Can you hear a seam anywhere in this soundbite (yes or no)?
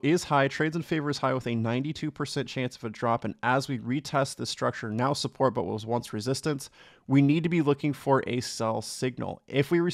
no